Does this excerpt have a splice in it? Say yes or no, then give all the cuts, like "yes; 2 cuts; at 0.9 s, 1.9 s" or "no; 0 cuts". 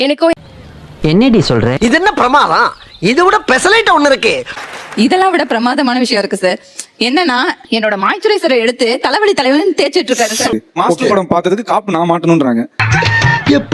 yes; 2 cuts; at 1.8 s, 10.5 s